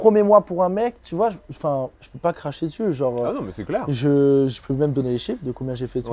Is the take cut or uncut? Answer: uncut